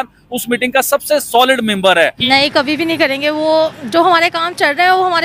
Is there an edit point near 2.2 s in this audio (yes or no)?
yes